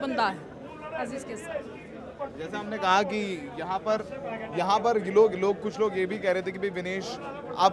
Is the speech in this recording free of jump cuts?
yes; 0 cuts

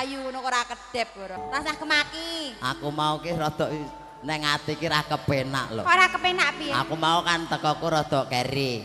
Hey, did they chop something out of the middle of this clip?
yes; 1 cut; at 1.3 s

